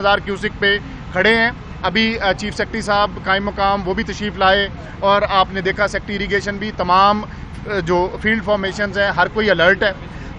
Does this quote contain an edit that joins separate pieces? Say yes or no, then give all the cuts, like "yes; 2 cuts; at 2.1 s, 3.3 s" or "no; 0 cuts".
no; 0 cuts